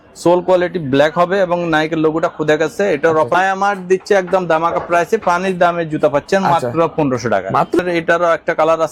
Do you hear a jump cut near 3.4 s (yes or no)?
yes